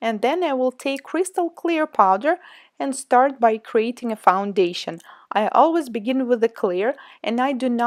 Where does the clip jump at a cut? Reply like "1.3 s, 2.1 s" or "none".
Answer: none